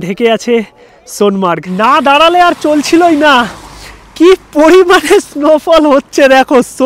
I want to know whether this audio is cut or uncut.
cut